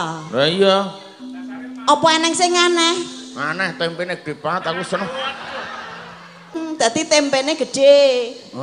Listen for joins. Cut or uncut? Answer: cut